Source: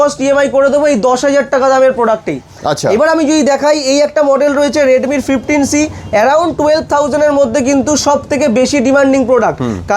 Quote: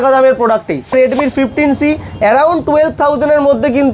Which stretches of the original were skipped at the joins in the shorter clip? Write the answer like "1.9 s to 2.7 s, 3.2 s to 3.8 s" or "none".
2.5 s to 4.9 s